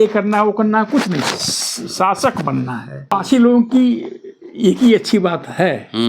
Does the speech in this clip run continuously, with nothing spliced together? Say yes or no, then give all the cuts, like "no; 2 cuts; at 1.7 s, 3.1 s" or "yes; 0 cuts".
no; 1 cut; at 3.1 s